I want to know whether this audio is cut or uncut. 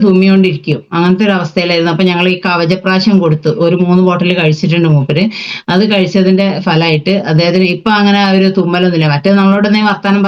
uncut